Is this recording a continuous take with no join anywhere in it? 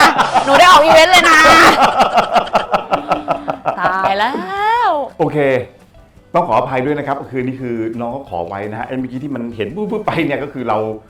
yes; 0 cuts

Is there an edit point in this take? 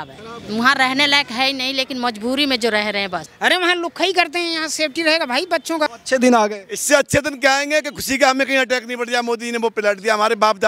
yes; 2 cuts; at 3.2 s, 5.9 s

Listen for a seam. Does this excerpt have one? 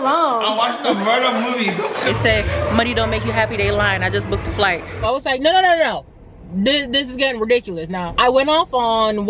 yes; 3 cuts; at 2.1 s, 5.1 s, 8.0 s

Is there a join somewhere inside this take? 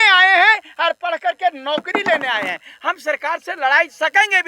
no; 0 cuts

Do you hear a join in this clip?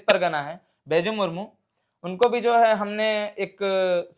no; 0 cuts

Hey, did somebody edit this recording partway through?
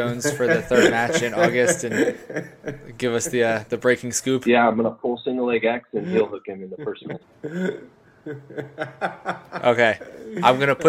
no; 0 cuts

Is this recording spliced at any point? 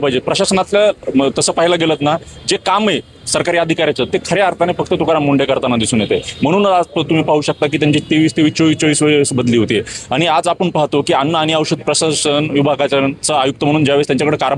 no; 0 cuts

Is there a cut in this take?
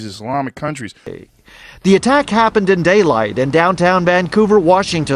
yes; 1 cut; at 1.0 s

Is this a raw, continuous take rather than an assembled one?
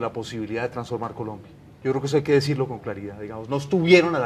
no; 1 cut; at 2.0 s

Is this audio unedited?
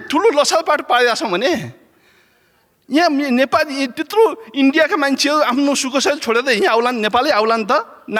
yes; 0 cuts

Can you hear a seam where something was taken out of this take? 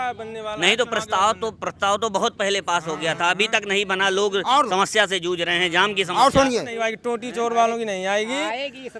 yes; 1 cut; at 6.8 s

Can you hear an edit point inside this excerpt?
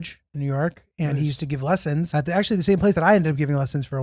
yes; 1 cut; at 2.1 s

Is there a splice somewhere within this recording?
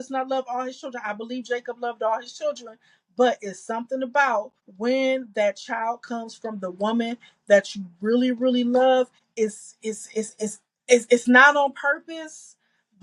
yes; 2 cuts; at 4.6 s, 9.2 s

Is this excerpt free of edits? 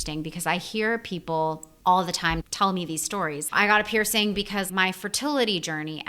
no; 3 cuts; at 1.7 s, 3.4 s, 4.7 s

